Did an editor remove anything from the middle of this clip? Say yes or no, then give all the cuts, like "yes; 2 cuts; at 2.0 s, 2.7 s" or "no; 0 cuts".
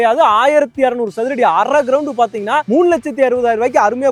no; 0 cuts